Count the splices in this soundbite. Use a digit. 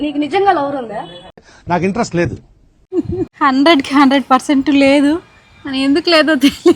0